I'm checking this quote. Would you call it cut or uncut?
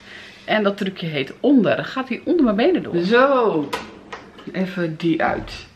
cut